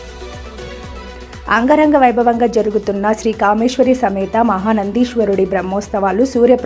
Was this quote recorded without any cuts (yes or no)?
yes